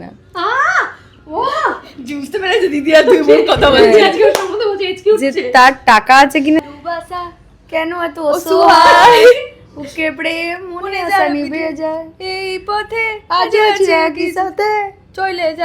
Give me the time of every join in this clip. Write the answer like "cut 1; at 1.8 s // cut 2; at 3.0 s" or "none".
cut 1; at 6.6 s